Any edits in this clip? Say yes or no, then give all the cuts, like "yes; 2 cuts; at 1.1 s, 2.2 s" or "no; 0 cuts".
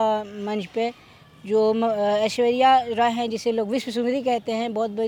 no; 0 cuts